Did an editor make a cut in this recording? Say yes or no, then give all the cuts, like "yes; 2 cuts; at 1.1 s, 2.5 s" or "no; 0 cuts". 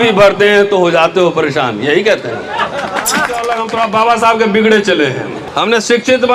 yes; 2 cuts; at 3.4 s, 5.4 s